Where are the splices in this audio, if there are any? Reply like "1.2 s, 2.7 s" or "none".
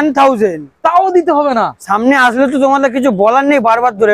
none